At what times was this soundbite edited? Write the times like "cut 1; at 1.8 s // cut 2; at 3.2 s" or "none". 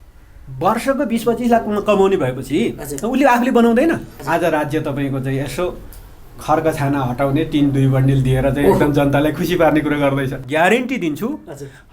cut 1; at 4.1 s // cut 2; at 10.4 s

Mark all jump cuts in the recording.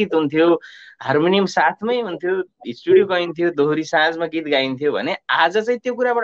none

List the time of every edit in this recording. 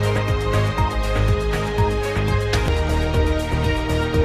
cut 1; at 2.6 s

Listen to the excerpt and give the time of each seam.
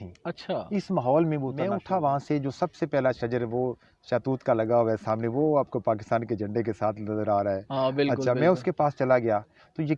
cut 1; at 1.7 s

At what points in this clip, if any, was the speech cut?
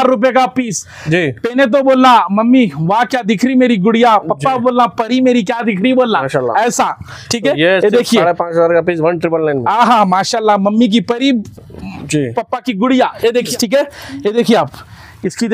cut 1; at 13.5 s

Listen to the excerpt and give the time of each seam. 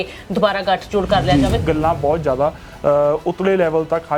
cut 1; at 1.6 s

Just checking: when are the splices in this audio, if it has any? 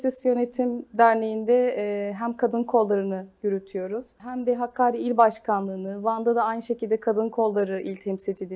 cut 1; at 4.2 s

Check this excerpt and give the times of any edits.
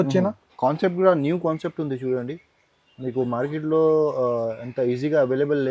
none

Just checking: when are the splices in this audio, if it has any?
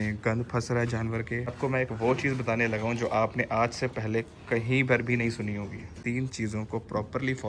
cut 1; at 1.5 s // cut 2; at 5.9 s

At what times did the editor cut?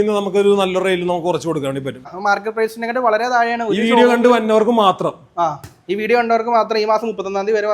cut 1; at 2.1 s

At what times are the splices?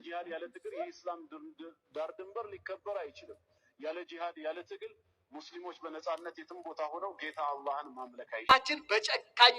cut 1; at 8.5 s

